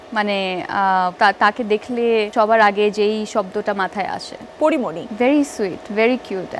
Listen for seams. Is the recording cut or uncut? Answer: cut